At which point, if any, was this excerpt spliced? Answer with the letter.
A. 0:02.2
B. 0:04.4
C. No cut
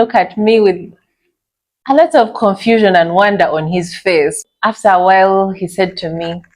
B